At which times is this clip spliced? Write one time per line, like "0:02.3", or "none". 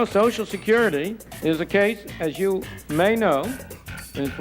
0:01.2
0:02.8